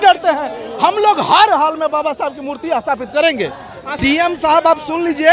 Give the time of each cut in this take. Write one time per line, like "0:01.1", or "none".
0:03.9